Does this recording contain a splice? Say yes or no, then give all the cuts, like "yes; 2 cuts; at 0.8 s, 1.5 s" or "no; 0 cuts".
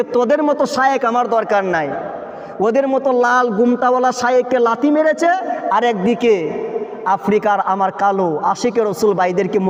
no; 0 cuts